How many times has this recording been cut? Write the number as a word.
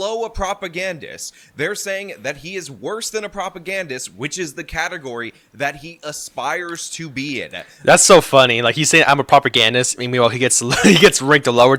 zero